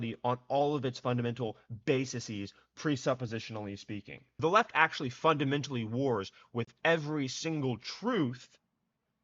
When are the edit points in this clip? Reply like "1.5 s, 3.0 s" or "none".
4.3 s